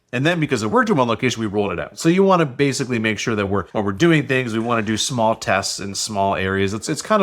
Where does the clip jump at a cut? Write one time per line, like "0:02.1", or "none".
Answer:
0:03.7